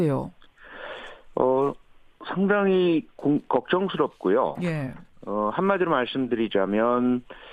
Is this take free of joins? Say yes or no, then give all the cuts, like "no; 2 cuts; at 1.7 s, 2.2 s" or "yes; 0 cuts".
no; 1 cut; at 2.6 s